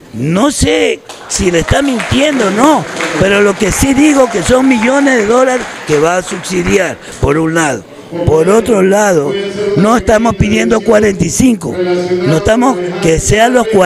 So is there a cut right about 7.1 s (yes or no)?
no